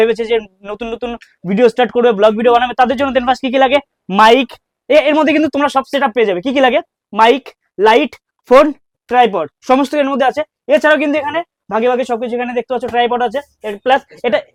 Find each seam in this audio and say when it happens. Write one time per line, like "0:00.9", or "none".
none